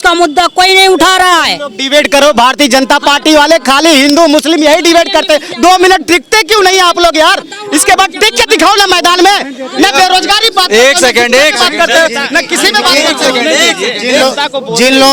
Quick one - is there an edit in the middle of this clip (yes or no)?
no